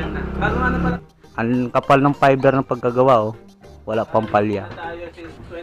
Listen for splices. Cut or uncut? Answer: cut